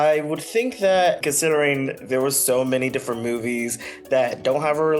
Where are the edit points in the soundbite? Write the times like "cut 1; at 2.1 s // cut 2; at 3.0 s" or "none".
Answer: cut 1; at 1.2 s